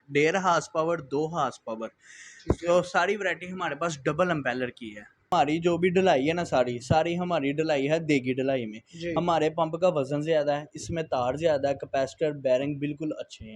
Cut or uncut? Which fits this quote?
cut